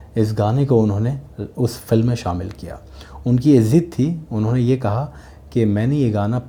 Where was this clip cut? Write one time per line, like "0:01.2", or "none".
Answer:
none